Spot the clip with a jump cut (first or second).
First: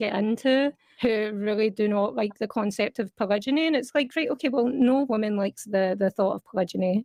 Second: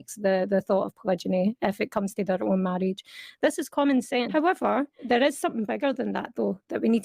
second